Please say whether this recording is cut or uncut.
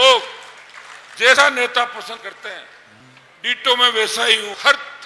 uncut